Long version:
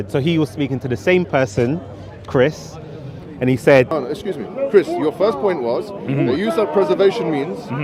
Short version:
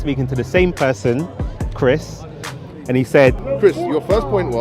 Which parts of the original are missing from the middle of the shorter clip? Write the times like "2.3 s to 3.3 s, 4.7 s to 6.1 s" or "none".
3.9 s to 4.5 s